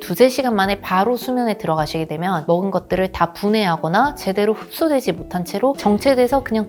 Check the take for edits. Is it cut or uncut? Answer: uncut